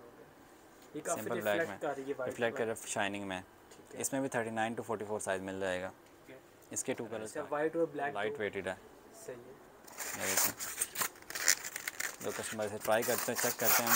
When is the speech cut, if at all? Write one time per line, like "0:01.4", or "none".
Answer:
0:07.3
0:08.2